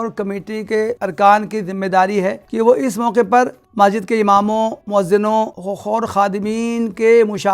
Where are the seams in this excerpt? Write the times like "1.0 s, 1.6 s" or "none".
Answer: 1.0 s, 2.4 s, 3.6 s, 4.8 s, 5.7 s